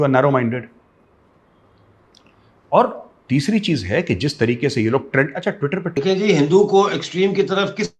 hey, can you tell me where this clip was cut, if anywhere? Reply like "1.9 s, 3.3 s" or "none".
6.0 s